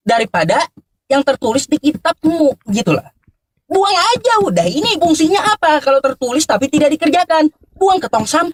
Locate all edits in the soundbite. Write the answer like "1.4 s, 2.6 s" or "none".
none

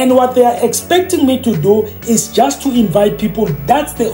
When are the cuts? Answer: none

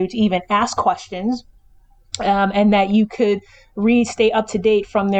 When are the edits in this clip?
none

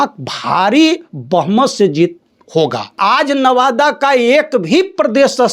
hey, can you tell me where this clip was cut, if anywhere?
3.0 s

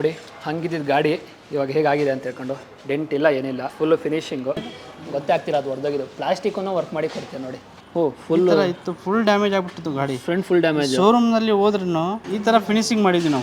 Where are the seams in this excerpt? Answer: 4.6 s, 7.7 s, 12.2 s

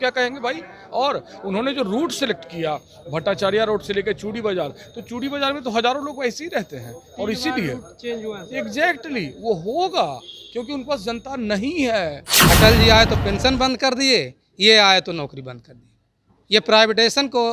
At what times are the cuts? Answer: 12.3 s

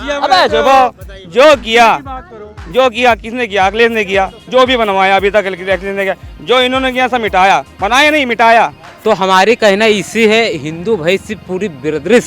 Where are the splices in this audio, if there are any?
8.9 s

